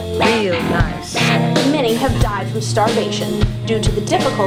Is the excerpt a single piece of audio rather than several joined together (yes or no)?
yes